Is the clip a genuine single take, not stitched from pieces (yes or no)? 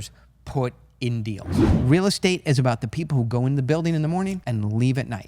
no